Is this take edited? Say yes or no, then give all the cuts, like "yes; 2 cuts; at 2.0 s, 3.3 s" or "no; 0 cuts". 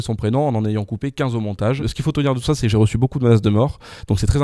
yes; 1 cut; at 1.9 s